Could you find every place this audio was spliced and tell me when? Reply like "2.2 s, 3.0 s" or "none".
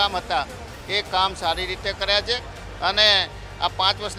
none